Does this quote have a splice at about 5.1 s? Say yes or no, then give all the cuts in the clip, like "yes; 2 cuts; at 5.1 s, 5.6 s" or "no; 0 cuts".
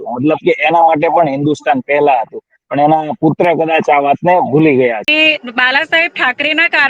yes; 1 cut; at 5.1 s